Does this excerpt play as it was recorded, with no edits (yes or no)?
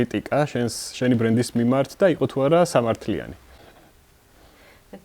no